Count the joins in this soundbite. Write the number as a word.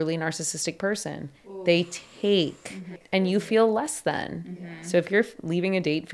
one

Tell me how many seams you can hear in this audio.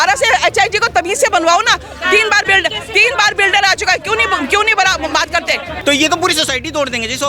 one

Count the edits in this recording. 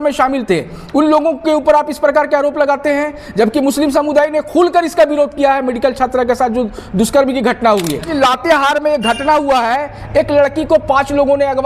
one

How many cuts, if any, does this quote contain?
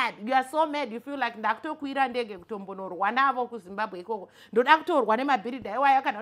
zero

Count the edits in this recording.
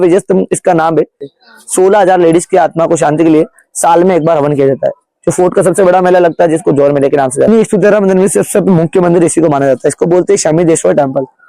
two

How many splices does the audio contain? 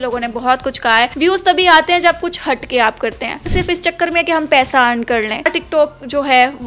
three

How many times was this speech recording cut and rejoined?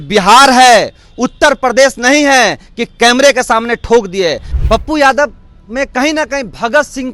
one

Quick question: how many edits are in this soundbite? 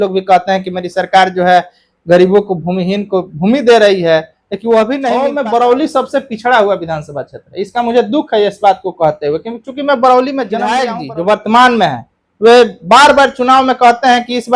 two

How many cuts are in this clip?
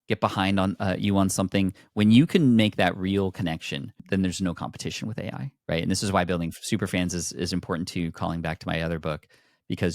two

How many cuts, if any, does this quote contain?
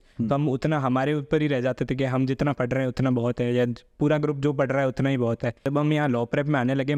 one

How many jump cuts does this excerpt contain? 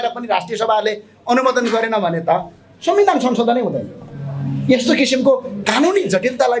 zero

